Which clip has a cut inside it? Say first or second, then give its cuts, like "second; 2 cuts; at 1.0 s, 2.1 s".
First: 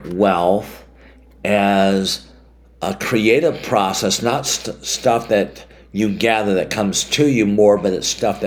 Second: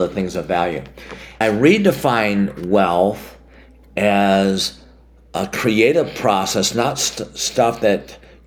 second; 1 cut; at 1.4 s